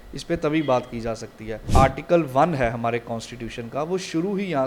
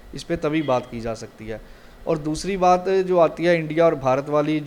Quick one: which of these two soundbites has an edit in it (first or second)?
first